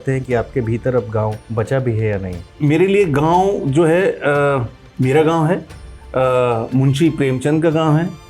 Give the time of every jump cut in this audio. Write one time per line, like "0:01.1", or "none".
0:01.4
0:02.4